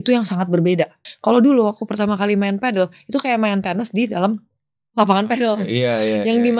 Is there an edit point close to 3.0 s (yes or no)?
no